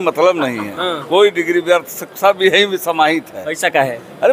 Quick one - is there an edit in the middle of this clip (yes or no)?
no